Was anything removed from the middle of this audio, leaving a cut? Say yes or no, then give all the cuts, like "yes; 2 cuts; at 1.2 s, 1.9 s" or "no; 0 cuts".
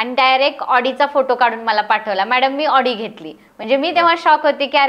no; 0 cuts